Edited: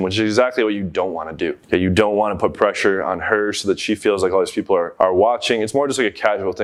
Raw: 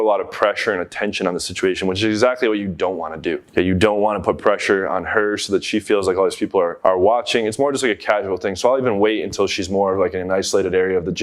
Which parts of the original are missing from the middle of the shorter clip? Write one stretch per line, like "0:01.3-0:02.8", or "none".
none